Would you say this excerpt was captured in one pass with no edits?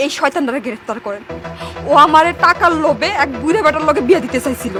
yes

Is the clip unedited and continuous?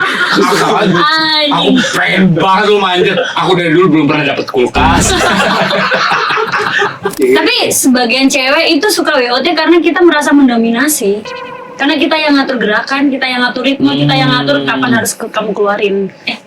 no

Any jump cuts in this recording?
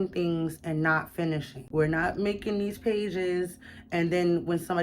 yes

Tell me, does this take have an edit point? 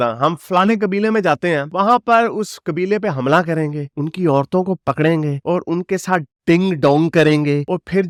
no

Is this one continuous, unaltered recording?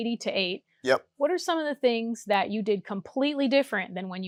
yes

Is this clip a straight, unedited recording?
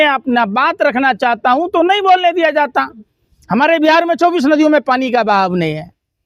yes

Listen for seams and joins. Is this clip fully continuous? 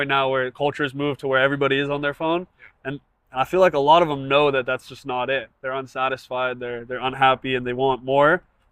yes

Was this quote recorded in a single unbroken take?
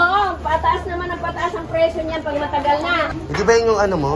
yes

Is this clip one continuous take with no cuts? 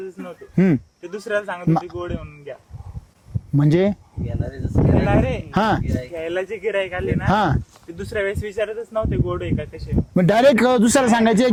yes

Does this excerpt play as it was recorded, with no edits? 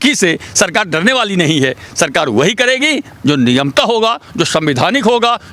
yes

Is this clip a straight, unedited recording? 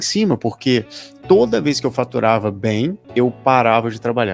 no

